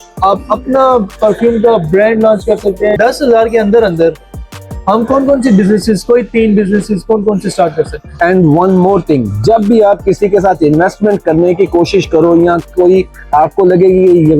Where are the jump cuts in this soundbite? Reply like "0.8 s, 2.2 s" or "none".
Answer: 3.0 s, 8.0 s